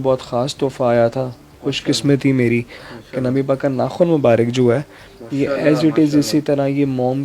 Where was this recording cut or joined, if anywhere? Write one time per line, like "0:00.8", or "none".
none